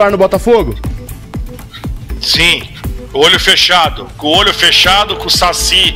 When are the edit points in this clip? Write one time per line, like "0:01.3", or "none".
none